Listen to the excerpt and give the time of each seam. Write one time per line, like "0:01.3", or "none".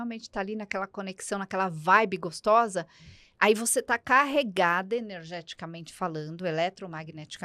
none